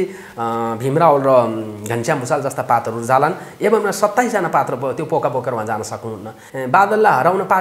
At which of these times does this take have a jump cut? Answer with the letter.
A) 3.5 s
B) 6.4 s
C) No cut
B